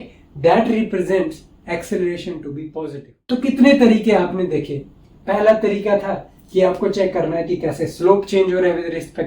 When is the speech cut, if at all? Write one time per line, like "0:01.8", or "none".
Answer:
0:02.8